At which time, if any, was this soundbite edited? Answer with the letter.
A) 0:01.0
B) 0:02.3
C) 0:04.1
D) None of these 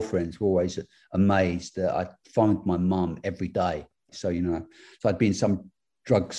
C